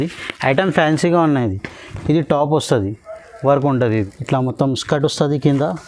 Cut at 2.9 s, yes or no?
no